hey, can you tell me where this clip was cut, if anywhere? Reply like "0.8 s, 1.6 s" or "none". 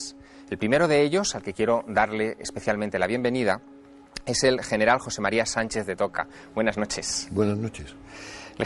2.5 s